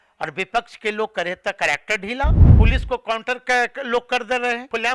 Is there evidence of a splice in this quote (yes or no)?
yes